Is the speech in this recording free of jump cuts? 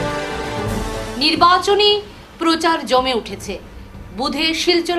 yes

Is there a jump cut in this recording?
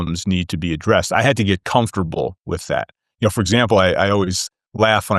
no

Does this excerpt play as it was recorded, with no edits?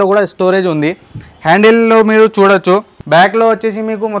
no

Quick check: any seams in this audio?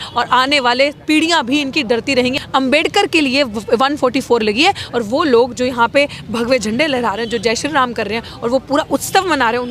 yes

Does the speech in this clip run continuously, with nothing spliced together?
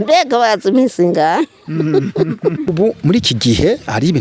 no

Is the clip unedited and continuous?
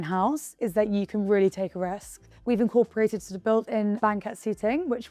no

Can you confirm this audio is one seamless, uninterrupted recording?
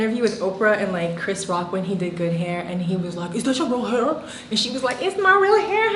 yes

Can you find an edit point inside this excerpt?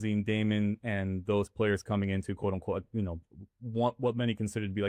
no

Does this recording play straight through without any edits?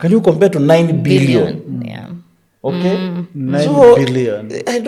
yes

